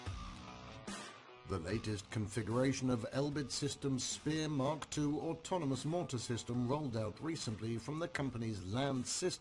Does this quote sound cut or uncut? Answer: uncut